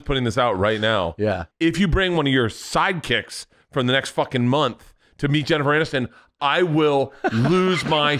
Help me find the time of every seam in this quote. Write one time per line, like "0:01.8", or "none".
0:01.5